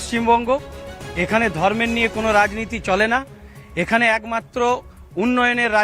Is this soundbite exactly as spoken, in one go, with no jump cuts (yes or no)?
yes